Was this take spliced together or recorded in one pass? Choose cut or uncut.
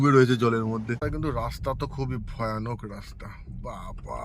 cut